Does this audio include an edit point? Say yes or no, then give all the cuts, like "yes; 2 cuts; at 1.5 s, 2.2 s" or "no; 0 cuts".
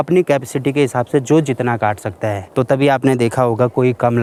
no; 0 cuts